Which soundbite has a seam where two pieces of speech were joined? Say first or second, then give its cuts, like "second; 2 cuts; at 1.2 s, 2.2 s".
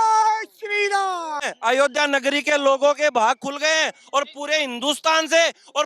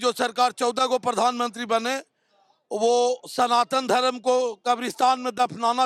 first; 1 cut; at 1.5 s